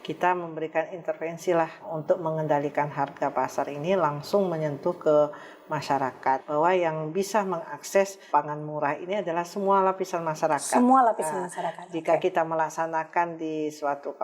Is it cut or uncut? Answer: cut